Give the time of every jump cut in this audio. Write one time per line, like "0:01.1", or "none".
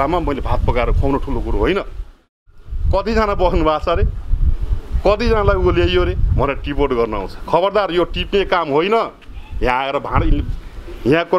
0:02.2